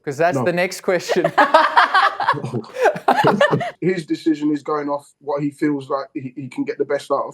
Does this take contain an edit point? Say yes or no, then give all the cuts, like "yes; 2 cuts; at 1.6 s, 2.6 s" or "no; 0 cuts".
yes; 1 cut; at 3.7 s